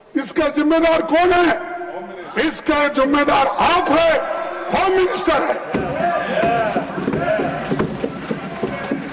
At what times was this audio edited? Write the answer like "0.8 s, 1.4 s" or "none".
none